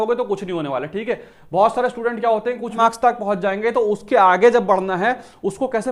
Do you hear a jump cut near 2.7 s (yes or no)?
yes